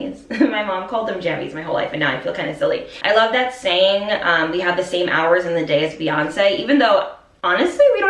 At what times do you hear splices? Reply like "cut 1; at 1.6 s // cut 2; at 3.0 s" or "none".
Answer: cut 1; at 2.9 s